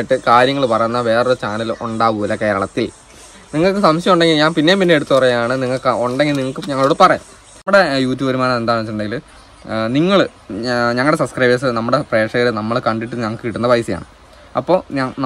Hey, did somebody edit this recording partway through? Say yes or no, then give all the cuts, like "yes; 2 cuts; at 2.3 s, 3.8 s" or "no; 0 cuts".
yes; 1 cut; at 7.7 s